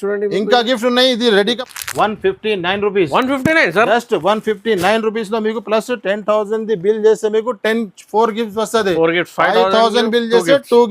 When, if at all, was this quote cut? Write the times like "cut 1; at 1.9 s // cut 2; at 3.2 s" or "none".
cut 1; at 1.6 s